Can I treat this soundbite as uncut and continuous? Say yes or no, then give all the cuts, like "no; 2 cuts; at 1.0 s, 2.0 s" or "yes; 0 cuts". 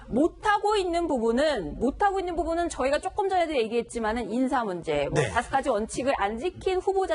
no; 1 cut; at 5.3 s